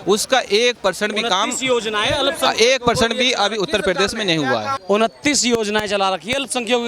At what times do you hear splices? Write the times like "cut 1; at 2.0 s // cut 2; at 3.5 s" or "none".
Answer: cut 1; at 4.7 s